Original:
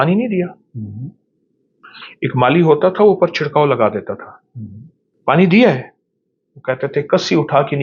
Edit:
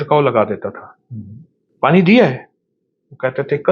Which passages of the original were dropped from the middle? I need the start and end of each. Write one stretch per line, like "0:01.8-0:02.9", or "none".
none